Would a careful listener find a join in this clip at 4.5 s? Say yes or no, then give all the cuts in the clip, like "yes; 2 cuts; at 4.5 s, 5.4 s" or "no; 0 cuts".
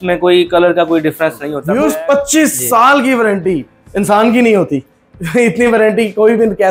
no; 1 cut; at 1.5 s